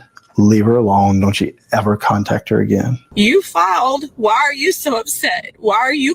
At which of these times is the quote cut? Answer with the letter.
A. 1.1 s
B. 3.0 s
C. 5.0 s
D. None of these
B